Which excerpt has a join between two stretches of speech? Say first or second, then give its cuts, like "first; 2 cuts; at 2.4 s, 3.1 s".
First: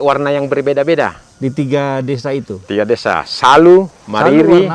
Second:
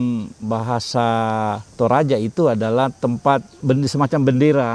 second; 2 cuts; at 1.6 s, 3.6 s